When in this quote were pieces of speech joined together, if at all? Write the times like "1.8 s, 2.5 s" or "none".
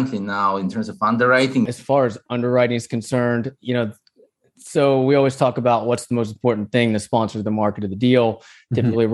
1.7 s